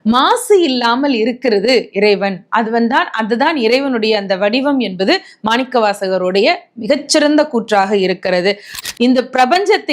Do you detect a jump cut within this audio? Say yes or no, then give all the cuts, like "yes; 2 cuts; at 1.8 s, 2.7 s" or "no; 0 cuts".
yes; 1 cut; at 8.8 s